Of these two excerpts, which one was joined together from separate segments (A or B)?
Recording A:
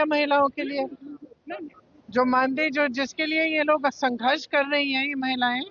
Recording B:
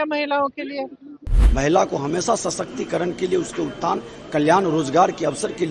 B